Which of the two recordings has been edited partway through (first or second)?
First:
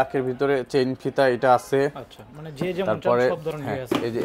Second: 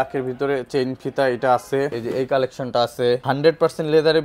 second